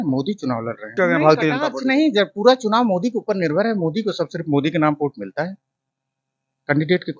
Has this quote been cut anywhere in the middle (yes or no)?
yes